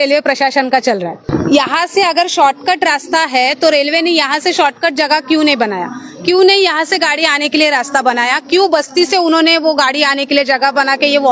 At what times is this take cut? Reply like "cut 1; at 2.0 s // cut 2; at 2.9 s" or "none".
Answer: cut 1; at 1.3 s